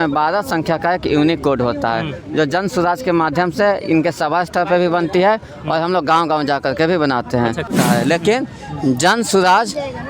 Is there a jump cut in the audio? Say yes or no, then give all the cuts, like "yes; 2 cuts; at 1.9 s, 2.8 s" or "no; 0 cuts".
yes; 1 cut; at 7.7 s